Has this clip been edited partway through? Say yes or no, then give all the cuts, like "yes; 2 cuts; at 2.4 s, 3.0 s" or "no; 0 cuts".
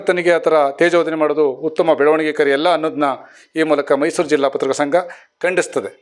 no; 0 cuts